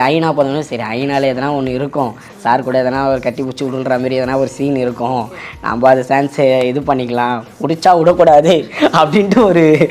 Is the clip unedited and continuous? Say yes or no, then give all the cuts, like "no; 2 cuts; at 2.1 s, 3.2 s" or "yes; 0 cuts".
yes; 0 cuts